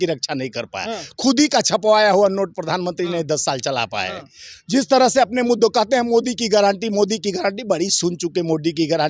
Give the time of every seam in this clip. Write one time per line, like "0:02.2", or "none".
none